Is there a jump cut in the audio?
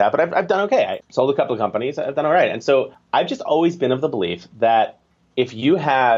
yes; 2 cuts; at 1.0 s, 3.0 s

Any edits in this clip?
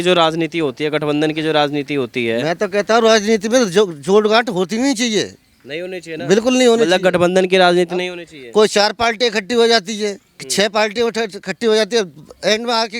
no; 0 cuts

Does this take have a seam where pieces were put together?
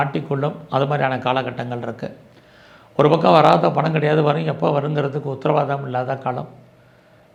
no; 0 cuts

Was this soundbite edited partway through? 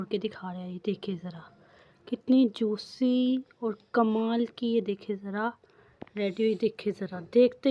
no; 0 cuts

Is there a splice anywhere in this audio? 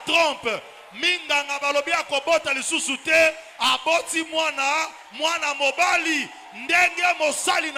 no; 0 cuts

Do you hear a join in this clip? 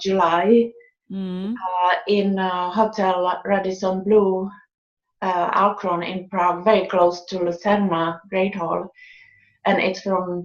yes; 1 cut; at 5.8 s

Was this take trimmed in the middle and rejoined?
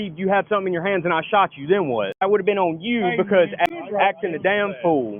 yes; 2 cuts; at 2.2 s, 3.7 s

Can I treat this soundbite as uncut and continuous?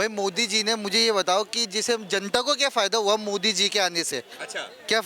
yes; 0 cuts

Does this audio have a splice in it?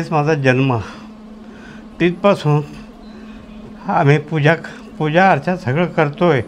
no; 0 cuts

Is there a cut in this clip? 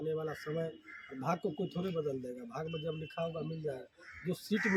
no; 0 cuts

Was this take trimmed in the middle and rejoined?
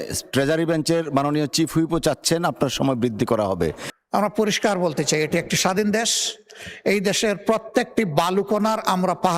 yes; 1 cut; at 3.9 s

